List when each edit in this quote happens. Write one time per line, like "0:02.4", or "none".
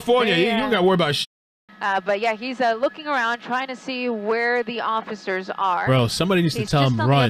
0:01.3